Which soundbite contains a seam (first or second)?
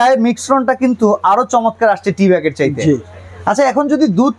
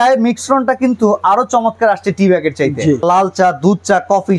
second